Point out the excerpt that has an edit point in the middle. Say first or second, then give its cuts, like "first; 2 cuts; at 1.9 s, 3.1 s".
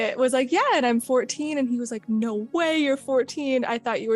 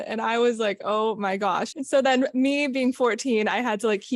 second; 1 cut; at 1.7 s